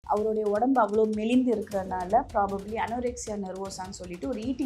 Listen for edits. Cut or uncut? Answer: uncut